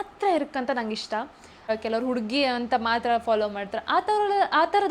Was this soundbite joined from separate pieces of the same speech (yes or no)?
yes